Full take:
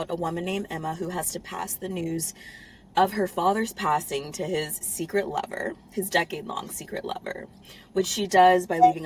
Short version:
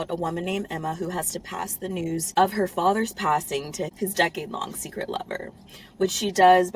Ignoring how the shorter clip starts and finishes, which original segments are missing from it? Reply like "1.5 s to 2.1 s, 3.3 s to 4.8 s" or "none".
2.3 s to 2.9 s, 4.5 s to 5.8 s